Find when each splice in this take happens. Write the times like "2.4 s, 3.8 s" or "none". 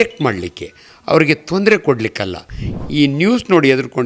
2.6 s